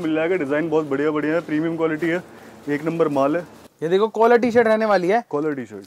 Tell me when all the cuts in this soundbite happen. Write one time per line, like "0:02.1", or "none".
0:03.6

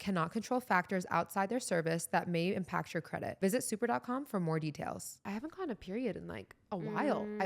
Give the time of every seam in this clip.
0:05.3

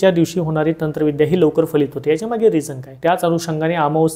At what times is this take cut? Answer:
0:02.8

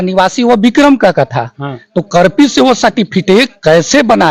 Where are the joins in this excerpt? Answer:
none

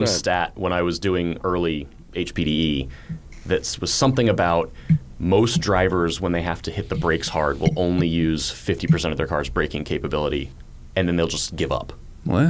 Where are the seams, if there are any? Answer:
none

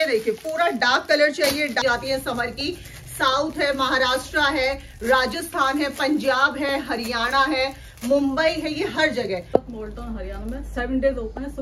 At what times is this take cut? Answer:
0:01.8
0:09.4

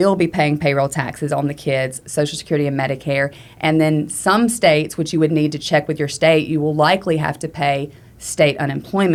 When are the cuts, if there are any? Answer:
none

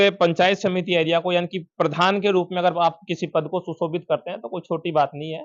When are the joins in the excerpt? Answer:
none

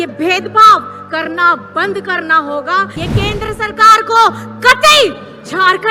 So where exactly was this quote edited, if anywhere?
0:02.9

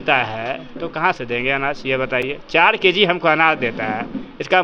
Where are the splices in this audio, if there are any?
none

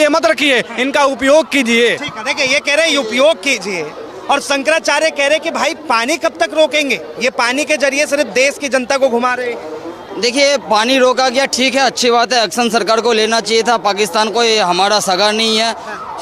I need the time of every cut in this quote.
none

